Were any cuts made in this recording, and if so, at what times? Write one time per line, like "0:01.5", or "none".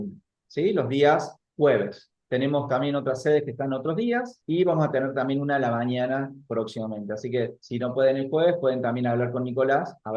none